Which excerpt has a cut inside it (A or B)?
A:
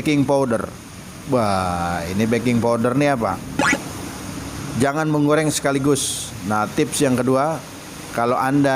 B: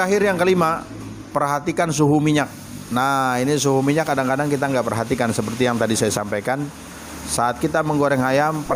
A